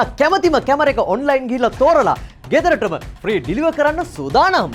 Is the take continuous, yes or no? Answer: yes